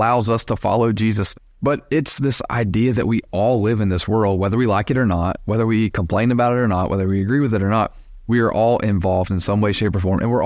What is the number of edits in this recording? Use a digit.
1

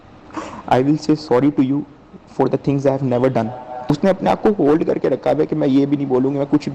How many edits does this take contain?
0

